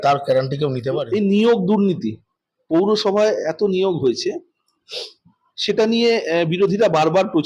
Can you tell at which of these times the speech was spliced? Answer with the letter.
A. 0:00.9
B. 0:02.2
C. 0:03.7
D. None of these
A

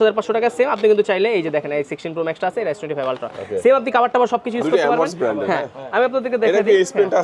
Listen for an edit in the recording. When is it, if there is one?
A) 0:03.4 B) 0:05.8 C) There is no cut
C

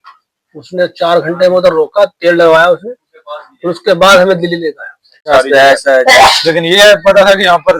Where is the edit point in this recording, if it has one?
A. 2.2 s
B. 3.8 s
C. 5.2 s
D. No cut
C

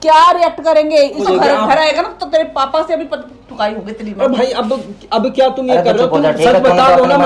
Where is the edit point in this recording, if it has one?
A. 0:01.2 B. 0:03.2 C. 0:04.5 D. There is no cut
A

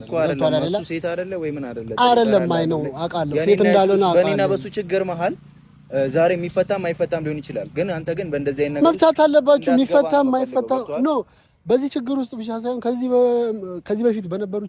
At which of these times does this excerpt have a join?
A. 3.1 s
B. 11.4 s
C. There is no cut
C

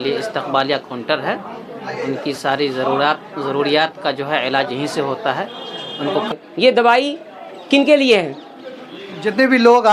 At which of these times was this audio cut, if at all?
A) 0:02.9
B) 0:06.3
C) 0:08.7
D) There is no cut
B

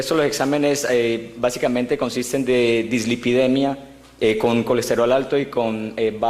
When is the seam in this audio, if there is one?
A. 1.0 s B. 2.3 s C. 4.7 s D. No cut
B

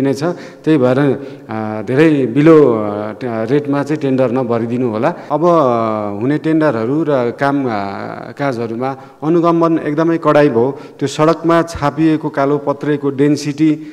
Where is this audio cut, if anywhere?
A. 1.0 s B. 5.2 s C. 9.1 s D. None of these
B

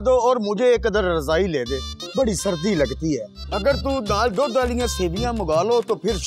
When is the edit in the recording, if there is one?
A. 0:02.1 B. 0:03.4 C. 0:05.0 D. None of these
B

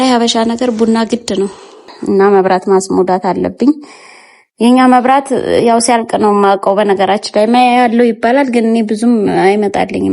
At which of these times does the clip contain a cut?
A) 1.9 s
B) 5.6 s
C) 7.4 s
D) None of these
A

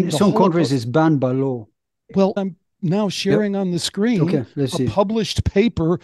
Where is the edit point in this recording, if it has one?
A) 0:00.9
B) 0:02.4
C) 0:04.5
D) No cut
B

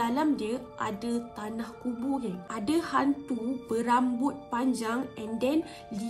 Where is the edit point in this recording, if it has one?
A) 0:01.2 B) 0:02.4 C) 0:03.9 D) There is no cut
B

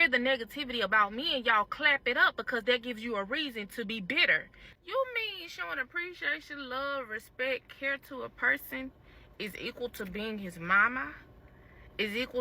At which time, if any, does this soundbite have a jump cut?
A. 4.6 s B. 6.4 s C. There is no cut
A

